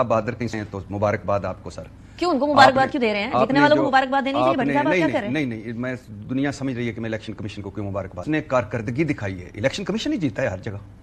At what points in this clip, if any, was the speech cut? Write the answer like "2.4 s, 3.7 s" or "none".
8.2 s